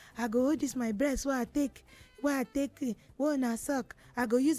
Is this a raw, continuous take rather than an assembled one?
yes; 0 cuts

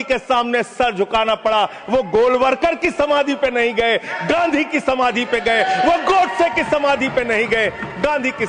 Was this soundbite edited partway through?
no; 0 cuts

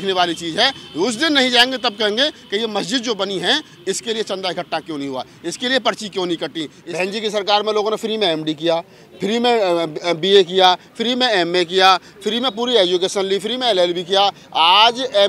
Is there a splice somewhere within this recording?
yes; 1 cut; at 6.8 s

